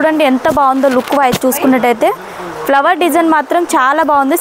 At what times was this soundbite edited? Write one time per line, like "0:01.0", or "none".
none